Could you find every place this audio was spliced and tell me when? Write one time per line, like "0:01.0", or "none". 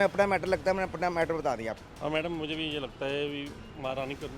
0:01.8